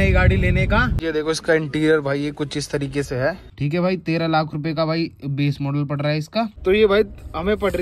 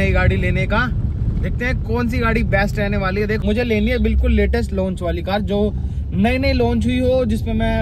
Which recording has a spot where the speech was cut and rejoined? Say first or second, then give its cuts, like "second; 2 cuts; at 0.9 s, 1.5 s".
first; 3 cuts; at 0.9 s, 3.5 s, 6.5 s